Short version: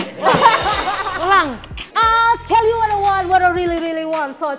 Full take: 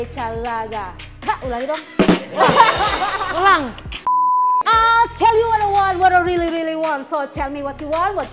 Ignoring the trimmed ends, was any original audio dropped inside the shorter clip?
yes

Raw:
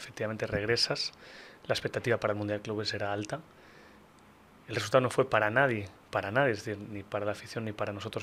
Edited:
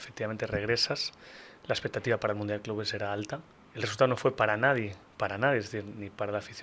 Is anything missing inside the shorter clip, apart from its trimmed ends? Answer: yes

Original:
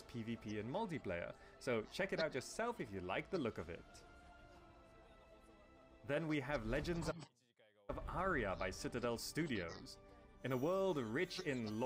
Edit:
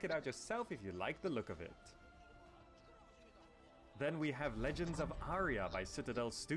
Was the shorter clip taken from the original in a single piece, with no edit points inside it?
no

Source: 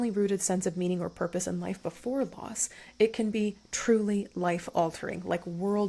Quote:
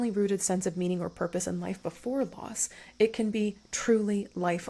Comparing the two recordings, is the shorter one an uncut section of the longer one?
yes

